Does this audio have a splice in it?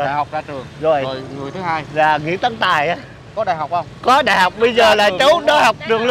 no; 0 cuts

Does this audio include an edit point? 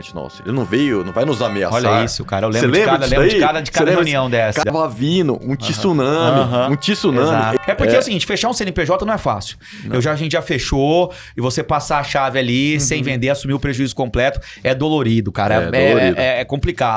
yes; 2 cuts; at 4.6 s, 7.6 s

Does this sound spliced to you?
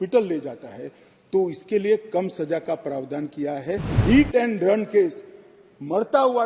yes; 1 cut; at 4.0 s

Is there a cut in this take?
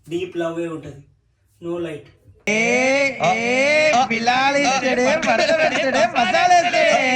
yes; 1 cut; at 2.2 s

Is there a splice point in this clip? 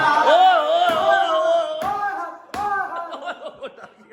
no; 0 cuts

